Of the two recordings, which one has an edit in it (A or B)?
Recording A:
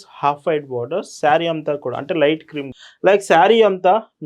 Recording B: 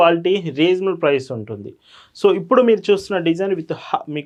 A